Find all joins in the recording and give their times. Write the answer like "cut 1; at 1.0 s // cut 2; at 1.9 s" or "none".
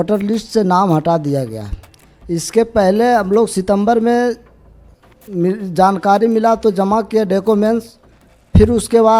none